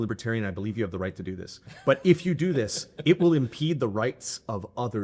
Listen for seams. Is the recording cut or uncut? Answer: uncut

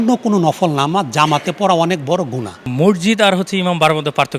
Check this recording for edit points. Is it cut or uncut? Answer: cut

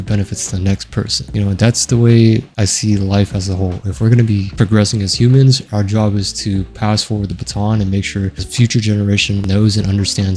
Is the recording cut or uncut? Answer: cut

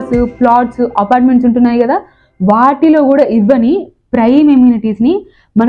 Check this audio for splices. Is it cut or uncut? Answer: uncut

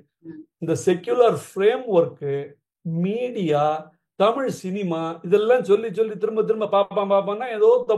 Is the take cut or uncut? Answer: uncut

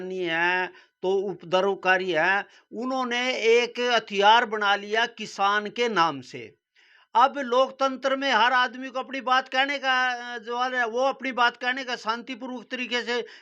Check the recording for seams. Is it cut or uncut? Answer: uncut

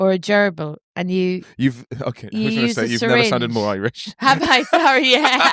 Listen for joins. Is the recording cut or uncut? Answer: uncut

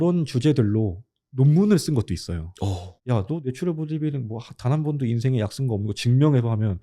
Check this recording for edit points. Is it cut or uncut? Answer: cut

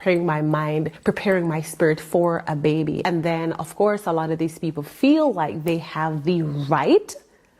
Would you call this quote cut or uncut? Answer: cut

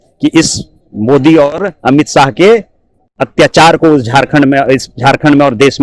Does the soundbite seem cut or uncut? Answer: uncut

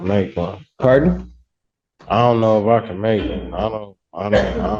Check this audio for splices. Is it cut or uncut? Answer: uncut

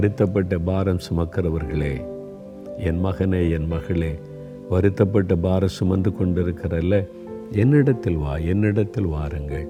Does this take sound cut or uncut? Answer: uncut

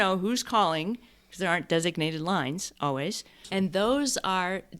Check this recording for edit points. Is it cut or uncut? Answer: cut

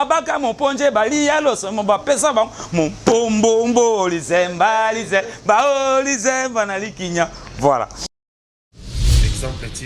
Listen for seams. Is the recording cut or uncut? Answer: cut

